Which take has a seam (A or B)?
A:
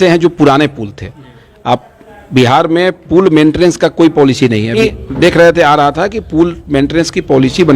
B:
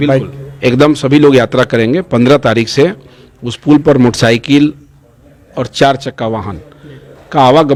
A